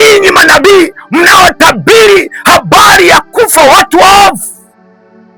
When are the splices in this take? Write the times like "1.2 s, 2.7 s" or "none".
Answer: none